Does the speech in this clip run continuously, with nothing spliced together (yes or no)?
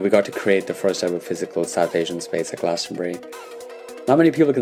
yes